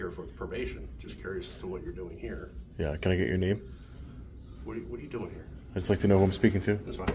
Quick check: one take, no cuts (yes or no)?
yes